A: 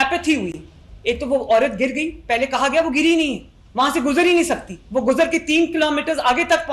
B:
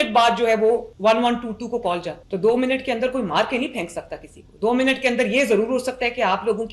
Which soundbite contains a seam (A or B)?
B